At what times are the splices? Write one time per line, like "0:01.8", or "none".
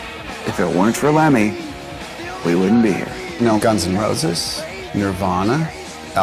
0:03.5

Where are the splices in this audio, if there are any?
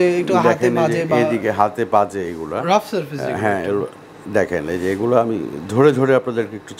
none

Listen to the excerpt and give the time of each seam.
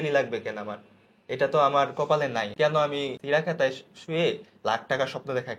0:02.5
0:03.2

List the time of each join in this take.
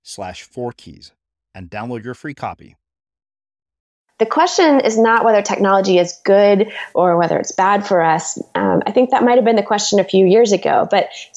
0:04.0

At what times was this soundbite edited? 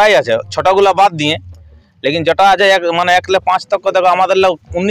none

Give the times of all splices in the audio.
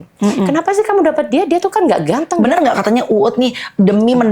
0:02.3

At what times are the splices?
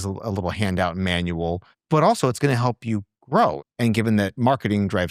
0:03.6

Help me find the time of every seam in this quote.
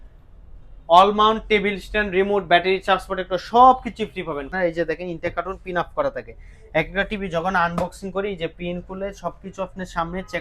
0:04.5

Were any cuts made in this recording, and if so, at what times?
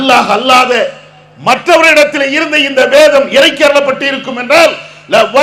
none

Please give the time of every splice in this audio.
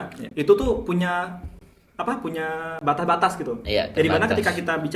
none

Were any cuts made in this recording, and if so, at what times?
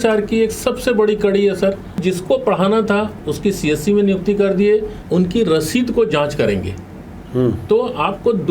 0:02.0
0:05.0

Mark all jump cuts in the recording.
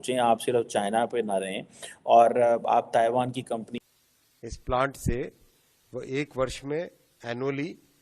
0:03.7

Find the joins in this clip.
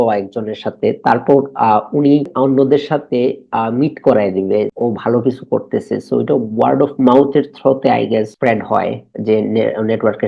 0:02.3
0:04.7
0:08.3

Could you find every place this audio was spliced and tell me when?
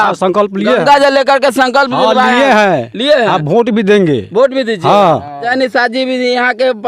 0:05.5

